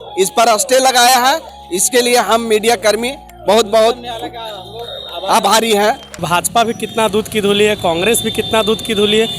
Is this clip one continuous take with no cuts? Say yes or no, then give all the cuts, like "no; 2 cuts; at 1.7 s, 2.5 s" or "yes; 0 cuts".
no; 1 cut; at 6.1 s